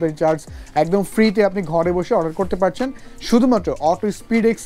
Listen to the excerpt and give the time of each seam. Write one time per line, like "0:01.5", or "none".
none